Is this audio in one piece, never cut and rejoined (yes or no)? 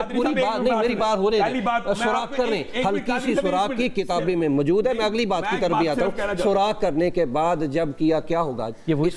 yes